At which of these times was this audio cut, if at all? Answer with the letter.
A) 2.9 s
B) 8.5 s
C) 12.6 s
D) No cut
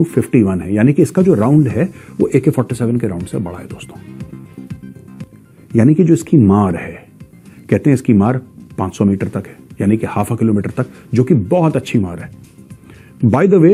D